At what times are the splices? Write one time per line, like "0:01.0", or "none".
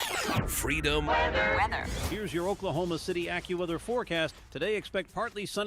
0:02.0